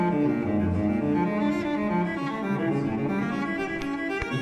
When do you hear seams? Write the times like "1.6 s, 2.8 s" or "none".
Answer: 3.1 s